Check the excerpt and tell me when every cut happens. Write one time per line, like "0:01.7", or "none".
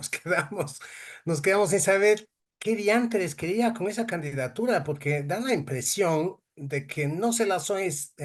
none